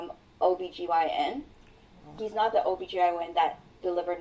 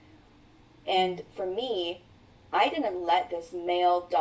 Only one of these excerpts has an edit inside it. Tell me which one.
first; 1 cut; at 2.1 s

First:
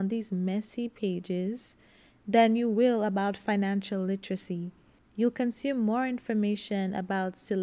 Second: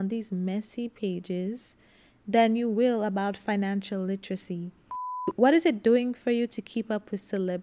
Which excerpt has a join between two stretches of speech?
second; 1 cut; at 5.1 s

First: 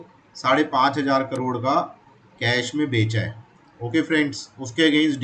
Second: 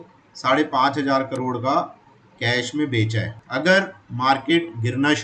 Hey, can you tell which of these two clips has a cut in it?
second; 1 cut; at 3.4 s

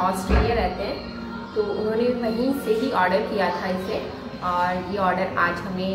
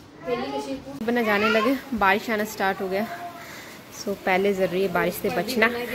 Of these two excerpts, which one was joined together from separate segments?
second; 1 cut; at 0.9 s

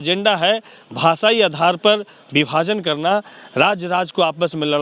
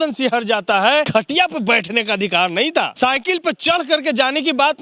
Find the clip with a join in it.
second; 2 cuts; at 1.1 s, 2.9 s

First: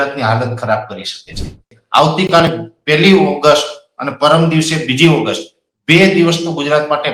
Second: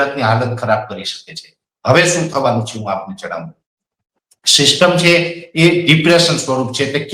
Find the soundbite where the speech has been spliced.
first; 1 cut; at 1.7 s

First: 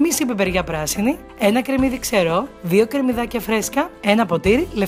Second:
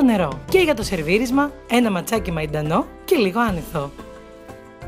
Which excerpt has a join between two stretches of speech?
second; 1 cut; at 3.9 s

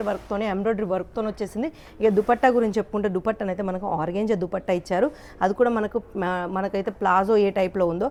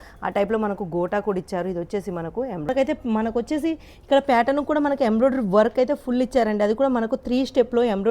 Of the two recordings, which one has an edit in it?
second; 1 cut; at 2.7 s

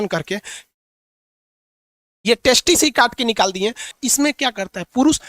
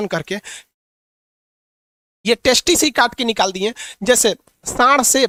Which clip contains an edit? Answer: first; 1 cut; at 3.9 s

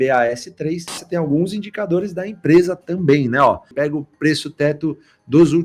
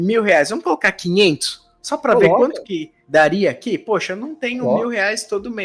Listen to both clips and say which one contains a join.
first; 2 cuts; at 1.0 s, 3.7 s

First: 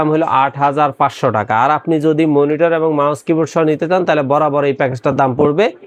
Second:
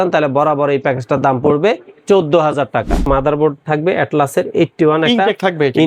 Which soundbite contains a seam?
second; 1 cut; at 3.1 s

